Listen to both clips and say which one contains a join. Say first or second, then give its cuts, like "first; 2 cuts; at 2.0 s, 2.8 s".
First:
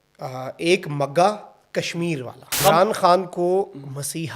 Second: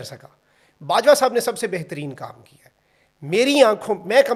first; 1 cut; at 2.6 s